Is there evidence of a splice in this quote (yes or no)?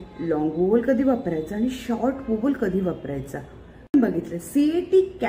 yes